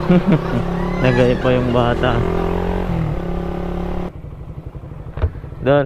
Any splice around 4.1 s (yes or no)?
yes